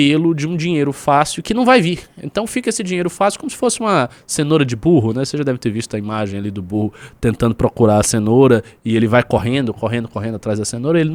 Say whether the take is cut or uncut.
uncut